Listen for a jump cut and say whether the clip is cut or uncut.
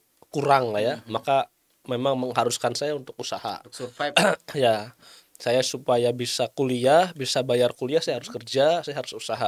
uncut